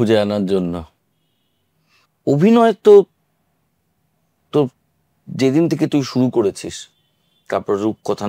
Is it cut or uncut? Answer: uncut